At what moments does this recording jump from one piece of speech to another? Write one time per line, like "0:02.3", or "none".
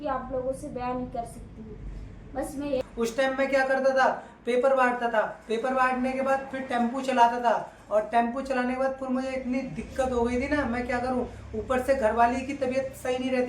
0:02.8